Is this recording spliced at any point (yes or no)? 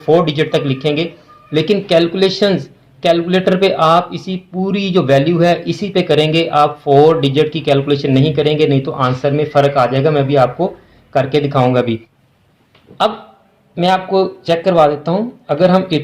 yes